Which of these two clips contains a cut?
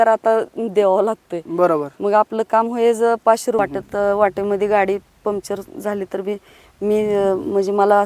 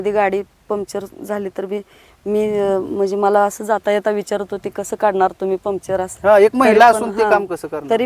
first; 1 cut; at 3.6 s

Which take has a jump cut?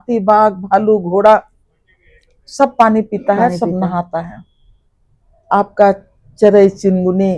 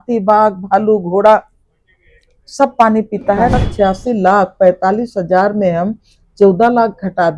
second; 1 cut; at 3.6 s

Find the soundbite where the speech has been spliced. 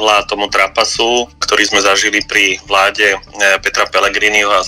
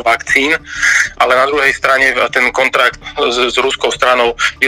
second; 1 cut; at 3.0 s

